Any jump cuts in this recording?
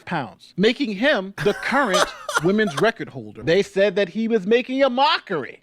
yes; 1 cut; at 3.2 s

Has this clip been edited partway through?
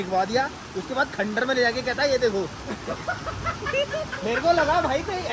no; 0 cuts

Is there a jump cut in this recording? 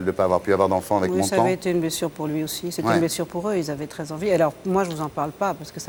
no; 0 cuts

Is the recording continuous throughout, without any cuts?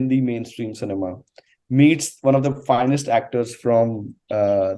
yes; 0 cuts

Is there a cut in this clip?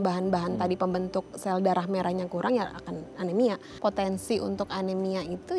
yes; 1 cut; at 3.7 s

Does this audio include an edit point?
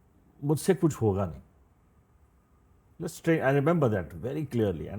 no; 0 cuts

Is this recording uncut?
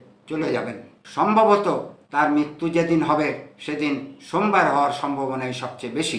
no; 1 cut; at 1.0 s

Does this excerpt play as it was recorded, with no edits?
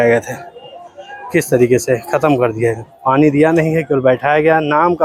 yes; 0 cuts

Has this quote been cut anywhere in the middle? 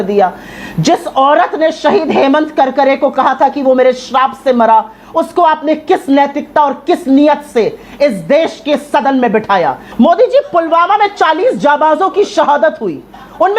yes; 1 cut; at 9.8 s

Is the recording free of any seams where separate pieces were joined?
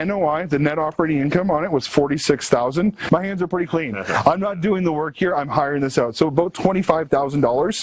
no; 1 cut; at 3.0 s

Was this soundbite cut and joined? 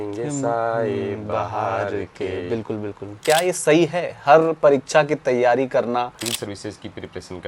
yes; 2 cuts; at 3.2 s, 6.1 s

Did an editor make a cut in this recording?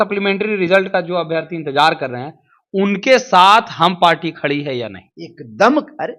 no; 0 cuts

